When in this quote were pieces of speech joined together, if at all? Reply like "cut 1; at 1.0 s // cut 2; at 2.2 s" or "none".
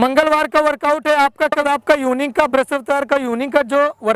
cut 1; at 1.7 s

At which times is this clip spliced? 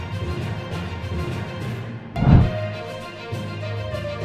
cut 1; at 1.3 s

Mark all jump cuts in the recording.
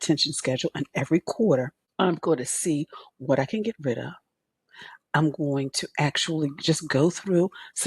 cut 1; at 1.8 s

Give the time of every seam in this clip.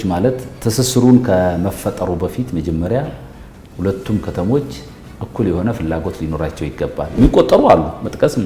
cut 1; at 7.1 s

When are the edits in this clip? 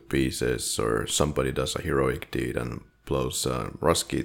none

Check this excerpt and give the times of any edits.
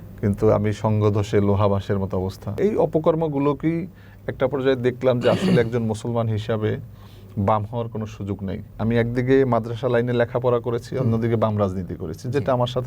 cut 1; at 2.6 s // cut 2; at 8.7 s

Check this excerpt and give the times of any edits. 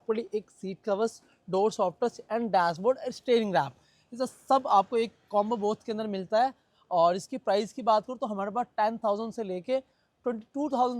none

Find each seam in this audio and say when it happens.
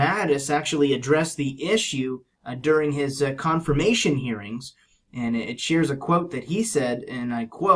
none

